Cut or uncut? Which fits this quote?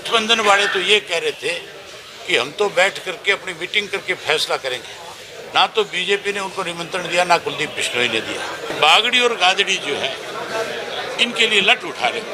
uncut